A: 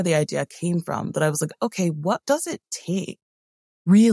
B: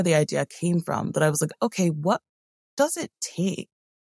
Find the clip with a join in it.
A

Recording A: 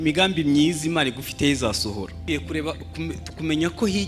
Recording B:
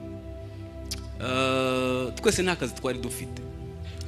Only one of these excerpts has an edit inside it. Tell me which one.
A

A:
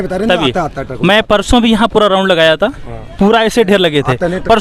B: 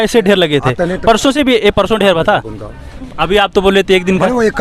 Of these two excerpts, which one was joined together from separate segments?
B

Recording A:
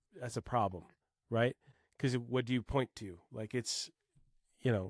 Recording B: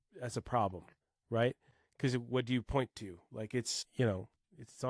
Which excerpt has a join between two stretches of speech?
B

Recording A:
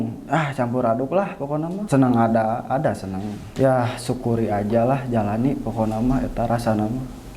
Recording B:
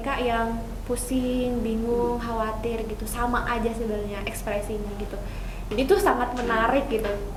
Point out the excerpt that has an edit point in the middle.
A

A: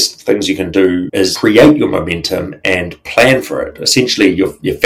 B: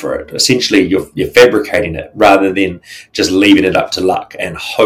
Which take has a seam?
A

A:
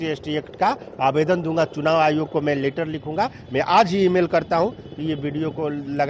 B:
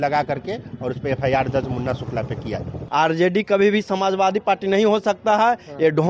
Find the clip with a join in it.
B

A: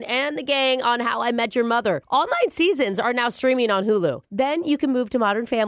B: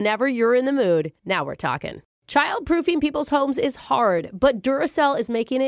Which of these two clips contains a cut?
B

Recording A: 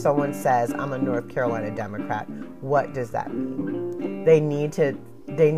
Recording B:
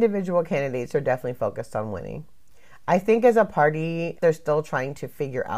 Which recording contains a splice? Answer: B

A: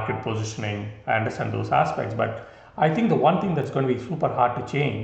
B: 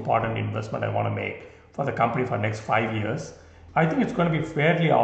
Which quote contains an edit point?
B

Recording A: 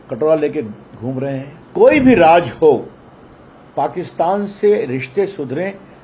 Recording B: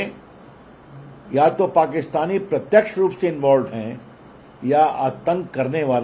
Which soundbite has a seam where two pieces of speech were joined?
A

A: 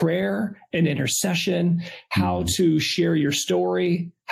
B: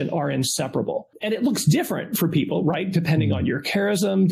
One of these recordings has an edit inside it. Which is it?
B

